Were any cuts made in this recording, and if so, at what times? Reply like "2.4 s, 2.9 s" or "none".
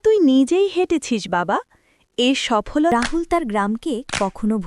2.9 s